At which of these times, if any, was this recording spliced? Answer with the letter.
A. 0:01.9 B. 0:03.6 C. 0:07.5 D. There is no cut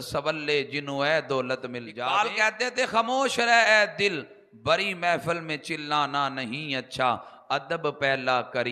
A